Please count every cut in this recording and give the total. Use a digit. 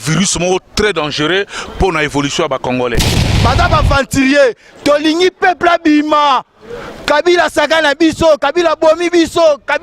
1